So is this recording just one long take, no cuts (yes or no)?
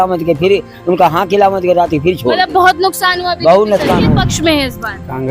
no